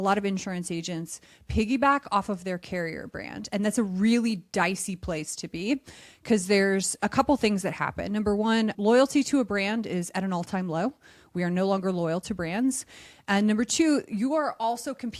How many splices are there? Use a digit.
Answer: 1